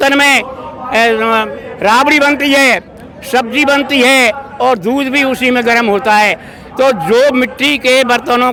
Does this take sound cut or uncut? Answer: uncut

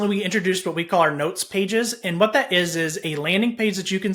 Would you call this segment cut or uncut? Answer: uncut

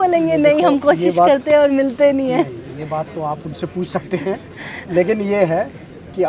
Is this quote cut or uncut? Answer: uncut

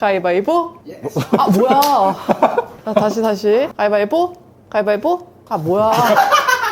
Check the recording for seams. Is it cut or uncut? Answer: cut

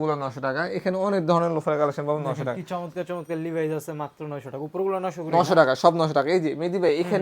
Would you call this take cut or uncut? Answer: uncut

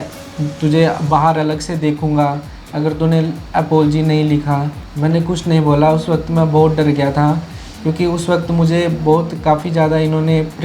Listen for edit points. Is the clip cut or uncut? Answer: cut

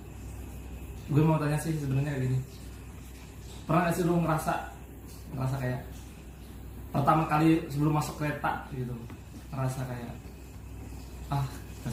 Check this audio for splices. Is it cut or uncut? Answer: uncut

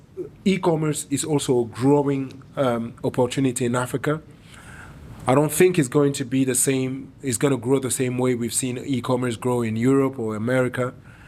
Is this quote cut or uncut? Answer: uncut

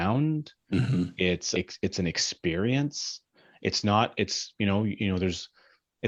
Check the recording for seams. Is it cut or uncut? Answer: uncut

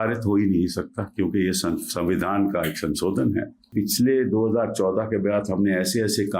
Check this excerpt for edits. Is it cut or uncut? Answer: cut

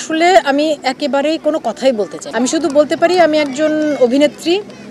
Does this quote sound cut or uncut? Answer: uncut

